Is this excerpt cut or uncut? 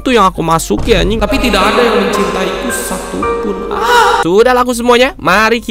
cut